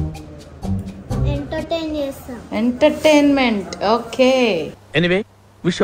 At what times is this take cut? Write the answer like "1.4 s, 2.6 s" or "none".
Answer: 4.8 s